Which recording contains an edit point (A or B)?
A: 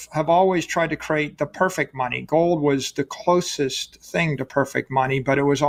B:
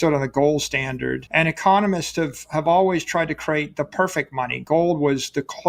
B